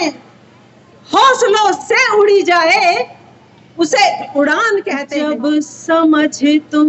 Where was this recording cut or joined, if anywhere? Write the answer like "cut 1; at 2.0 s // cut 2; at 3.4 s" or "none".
cut 1; at 5.0 s